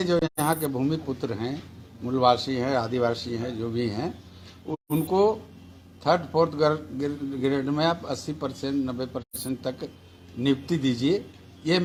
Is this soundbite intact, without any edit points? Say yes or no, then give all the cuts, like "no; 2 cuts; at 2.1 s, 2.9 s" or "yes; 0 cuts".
yes; 0 cuts